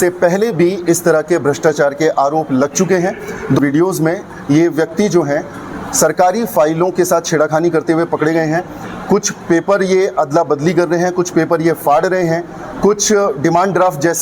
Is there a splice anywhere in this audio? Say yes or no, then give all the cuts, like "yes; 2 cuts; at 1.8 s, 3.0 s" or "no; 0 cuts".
yes; 1 cut; at 3.6 s